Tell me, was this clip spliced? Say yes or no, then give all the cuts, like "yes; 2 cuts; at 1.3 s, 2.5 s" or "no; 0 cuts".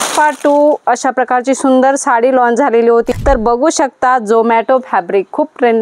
yes; 1 cut; at 3.1 s